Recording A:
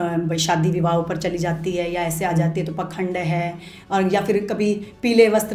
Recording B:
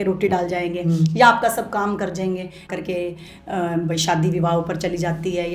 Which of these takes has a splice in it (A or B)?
B